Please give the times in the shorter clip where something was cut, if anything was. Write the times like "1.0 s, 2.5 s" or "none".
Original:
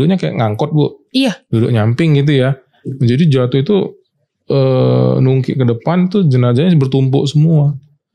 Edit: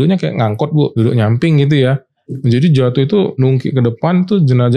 0.9 s, 3.4 s